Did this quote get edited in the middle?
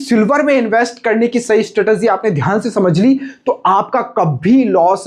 no; 0 cuts

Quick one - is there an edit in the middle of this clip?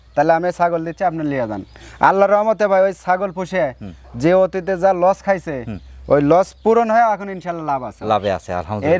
no; 0 cuts

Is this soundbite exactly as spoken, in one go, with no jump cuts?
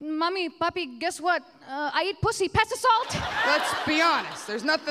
no; 1 cut; at 3.2 s

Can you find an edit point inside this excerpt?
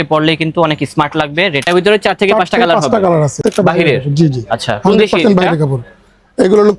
yes; 2 cuts; at 1.6 s, 3.4 s

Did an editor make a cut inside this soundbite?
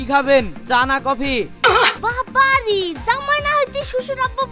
no; 0 cuts

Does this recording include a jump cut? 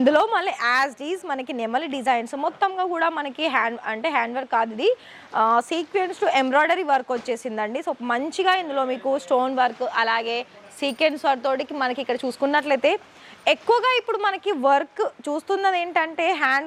no; 0 cuts

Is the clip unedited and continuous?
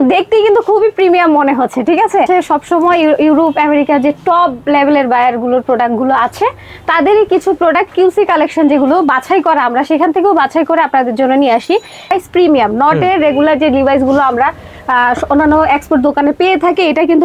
no; 2 cuts; at 2.3 s, 12.1 s

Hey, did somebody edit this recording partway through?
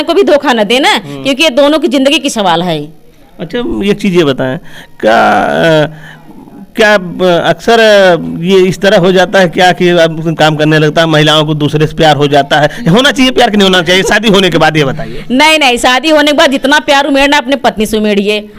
no; 0 cuts

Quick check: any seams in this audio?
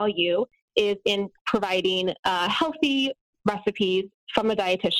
no; 0 cuts

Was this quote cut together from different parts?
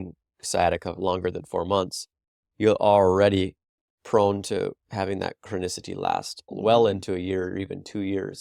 no; 0 cuts

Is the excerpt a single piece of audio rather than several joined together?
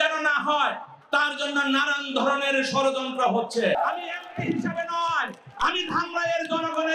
no; 1 cut; at 3.8 s

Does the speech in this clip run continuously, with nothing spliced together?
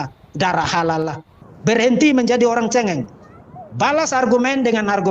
no; 1 cut; at 1.2 s

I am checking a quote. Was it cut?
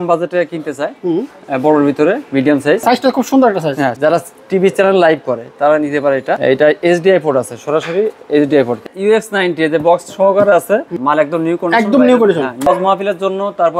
yes; 6 cuts; at 2.8 s, 3.9 s, 6.4 s, 8.8 s, 10.9 s, 12.7 s

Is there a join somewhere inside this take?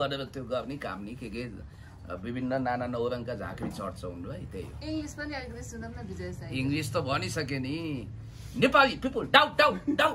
no; 0 cuts

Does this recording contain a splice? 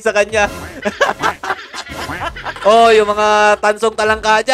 yes; 1 cut; at 2.5 s

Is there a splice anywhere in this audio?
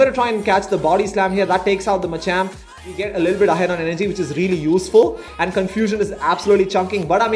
yes; 1 cut; at 2.8 s

